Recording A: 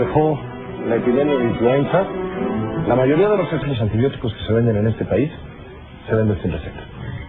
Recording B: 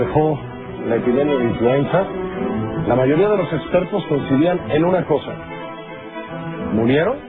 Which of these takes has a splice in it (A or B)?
B